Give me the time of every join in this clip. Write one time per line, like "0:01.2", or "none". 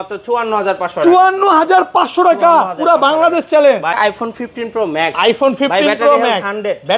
0:03.9